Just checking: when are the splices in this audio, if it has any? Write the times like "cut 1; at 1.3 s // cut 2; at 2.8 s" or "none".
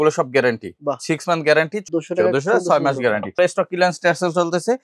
cut 1; at 1.8 s // cut 2; at 3.3 s